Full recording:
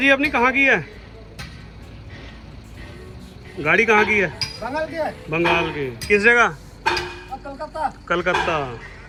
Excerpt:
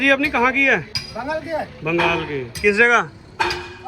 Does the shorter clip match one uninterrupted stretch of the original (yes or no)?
no